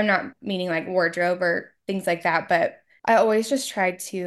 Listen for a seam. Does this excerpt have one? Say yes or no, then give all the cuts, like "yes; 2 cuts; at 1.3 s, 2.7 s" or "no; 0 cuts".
yes; 1 cut; at 2.9 s